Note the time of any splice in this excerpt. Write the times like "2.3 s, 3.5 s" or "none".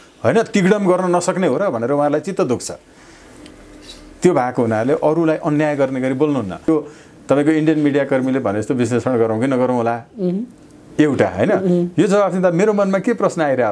6.7 s

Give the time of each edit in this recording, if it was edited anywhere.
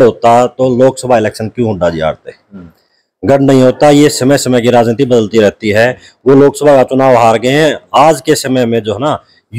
none

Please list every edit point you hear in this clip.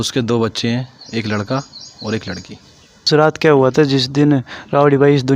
3.0 s

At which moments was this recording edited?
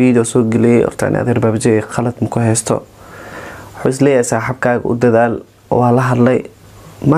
none

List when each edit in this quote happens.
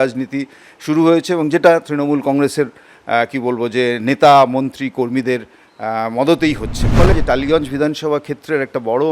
7.1 s

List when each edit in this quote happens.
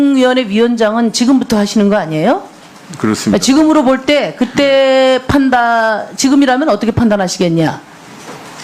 6.8 s

